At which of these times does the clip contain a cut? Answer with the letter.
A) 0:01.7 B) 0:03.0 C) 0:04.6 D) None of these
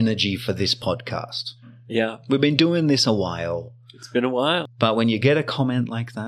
C